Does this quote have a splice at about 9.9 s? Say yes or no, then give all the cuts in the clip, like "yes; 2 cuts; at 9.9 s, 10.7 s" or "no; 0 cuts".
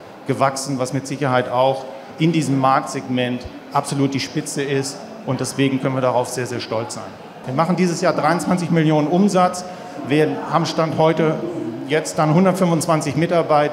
no; 1 cut; at 7.4 s